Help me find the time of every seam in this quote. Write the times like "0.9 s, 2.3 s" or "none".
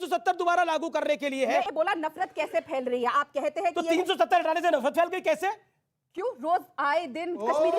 1.6 s